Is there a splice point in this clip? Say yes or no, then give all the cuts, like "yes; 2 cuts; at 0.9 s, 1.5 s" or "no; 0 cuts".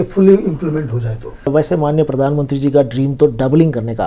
yes; 1 cut; at 1.5 s